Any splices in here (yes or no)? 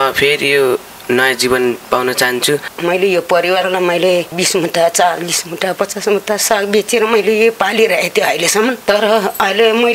yes